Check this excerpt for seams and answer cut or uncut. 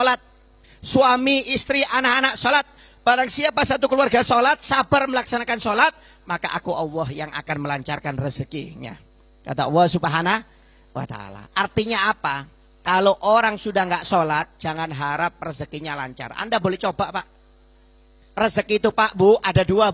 uncut